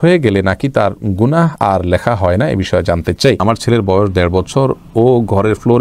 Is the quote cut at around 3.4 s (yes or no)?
yes